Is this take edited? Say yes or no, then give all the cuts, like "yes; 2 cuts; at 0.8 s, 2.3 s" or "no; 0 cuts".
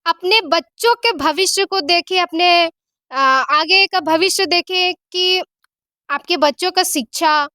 no; 0 cuts